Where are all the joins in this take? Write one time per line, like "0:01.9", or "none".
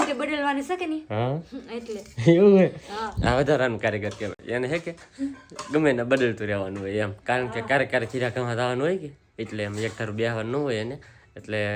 none